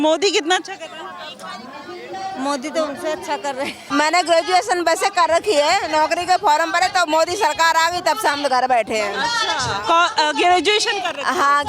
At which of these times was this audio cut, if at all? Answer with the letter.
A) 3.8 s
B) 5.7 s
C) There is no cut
A